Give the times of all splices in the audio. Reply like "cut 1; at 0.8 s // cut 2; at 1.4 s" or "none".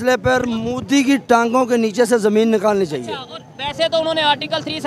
none